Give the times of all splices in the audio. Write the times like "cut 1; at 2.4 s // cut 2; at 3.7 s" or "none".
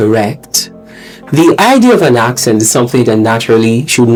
none

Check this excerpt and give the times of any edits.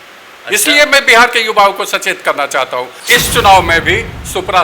cut 1; at 3.0 s

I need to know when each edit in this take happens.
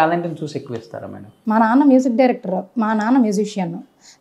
cut 1; at 1.3 s

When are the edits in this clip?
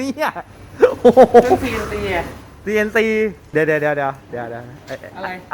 cut 1; at 3.5 s

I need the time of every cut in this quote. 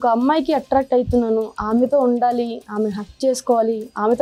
none

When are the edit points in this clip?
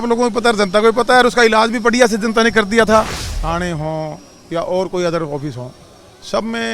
cut 1; at 3.2 s

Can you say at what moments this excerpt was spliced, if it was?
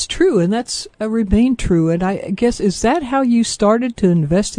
cut 1; at 1.2 s

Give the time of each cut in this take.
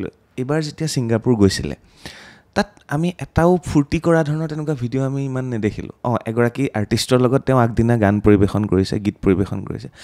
none

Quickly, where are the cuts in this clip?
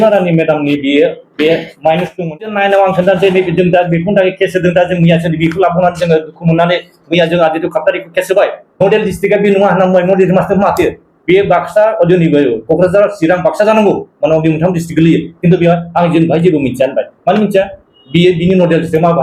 cut 1; at 2.5 s // cut 2; at 8.6 s

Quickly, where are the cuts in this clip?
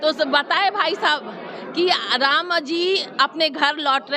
none

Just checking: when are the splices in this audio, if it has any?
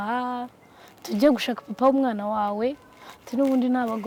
none

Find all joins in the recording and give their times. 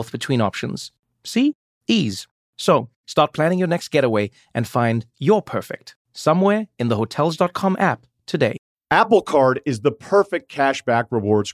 cut 1; at 8.7 s

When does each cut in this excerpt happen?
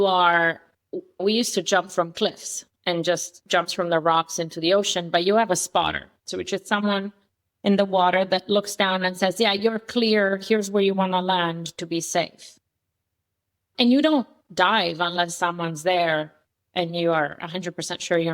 cut 1; at 1.2 s // cut 2; at 13.6 s

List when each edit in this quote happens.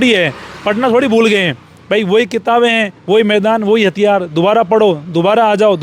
none

